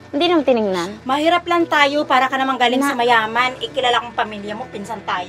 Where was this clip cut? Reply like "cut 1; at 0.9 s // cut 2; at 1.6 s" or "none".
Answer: cut 1; at 0.9 s